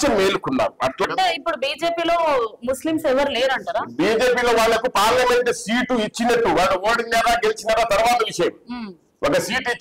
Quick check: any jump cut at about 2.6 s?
no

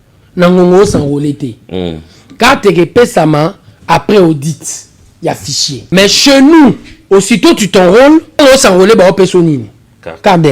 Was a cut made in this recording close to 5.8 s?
yes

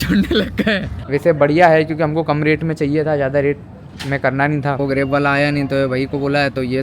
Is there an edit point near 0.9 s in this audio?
yes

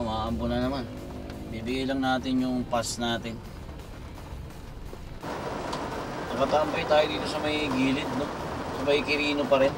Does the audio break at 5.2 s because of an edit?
yes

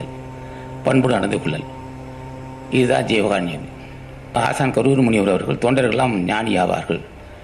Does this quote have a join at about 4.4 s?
yes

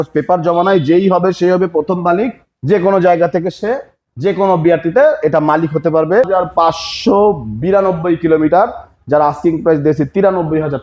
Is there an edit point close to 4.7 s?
no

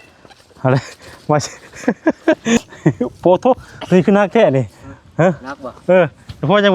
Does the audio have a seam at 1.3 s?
no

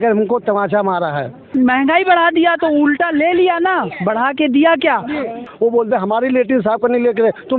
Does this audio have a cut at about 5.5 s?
yes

